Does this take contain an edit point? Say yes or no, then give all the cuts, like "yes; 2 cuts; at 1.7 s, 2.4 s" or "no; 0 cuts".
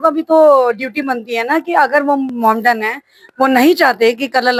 no; 0 cuts